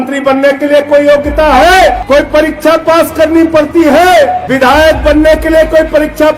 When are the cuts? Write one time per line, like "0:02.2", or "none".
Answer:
0:02.0
0:04.4